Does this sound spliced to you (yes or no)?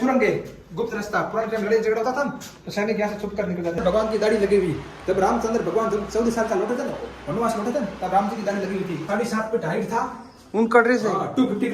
yes